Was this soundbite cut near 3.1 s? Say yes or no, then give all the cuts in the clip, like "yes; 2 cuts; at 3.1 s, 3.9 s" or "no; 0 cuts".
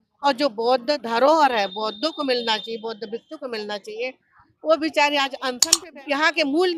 no; 1 cut; at 5.7 s